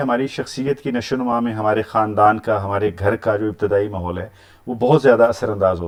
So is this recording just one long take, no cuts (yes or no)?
yes